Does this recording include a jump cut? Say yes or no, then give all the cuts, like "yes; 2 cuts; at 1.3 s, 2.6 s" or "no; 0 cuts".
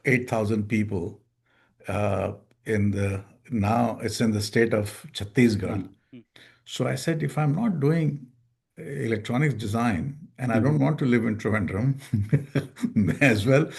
yes; 1 cut; at 5.9 s